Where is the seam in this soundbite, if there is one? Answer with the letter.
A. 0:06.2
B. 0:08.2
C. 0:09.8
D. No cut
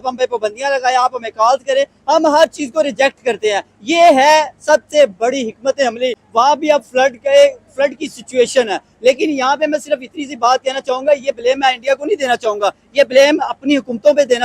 A